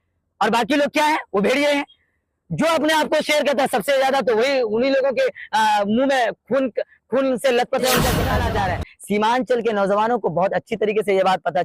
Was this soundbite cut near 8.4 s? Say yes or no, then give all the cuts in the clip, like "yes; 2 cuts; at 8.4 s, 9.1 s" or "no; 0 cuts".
yes; 1 cut; at 8.4 s